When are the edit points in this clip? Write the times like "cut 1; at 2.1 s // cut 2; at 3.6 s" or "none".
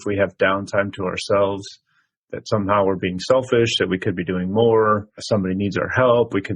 none

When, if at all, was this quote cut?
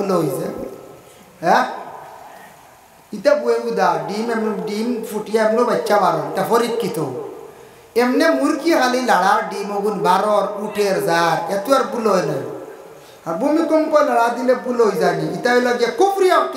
none

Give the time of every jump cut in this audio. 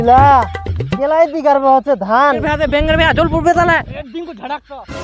cut 1; at 2.4 s // cut 2; at 3.9 s

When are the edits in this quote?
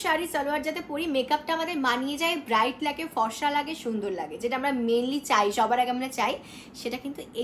none

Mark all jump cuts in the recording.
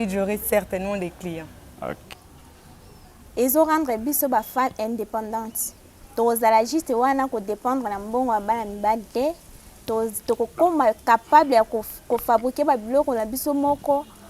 cut 1; at 2.1 s

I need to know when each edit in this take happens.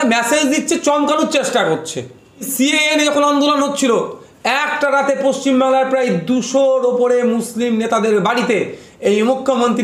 cut 1; at 2.5 s

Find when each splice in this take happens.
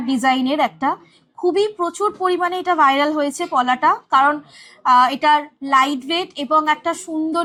none

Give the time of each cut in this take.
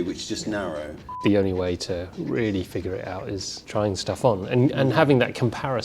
cut 1; at 1.1 s // cut 2; at 3.5 s

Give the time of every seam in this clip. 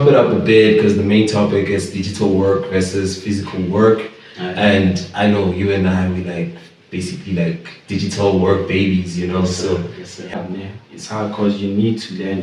cut 1; at 10.3 s

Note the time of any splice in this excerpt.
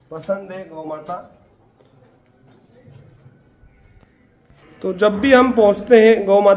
none

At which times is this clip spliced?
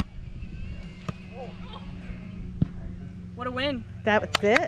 none

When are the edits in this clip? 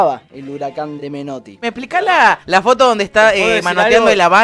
cut 1; at 1.5 s // cut 2; at 2.4 s

